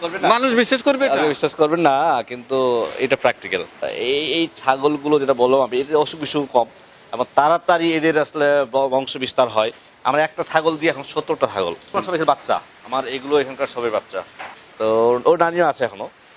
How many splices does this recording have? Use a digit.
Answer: 2